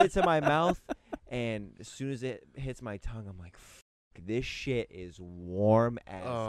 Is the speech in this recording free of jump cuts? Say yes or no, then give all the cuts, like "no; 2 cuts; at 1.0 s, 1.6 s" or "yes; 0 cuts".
yes; 0 cuts